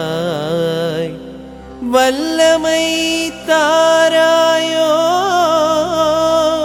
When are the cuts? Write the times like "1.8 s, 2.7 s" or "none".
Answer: none